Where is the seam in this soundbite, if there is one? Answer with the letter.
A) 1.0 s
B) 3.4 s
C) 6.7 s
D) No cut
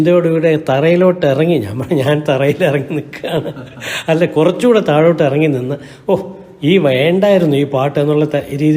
D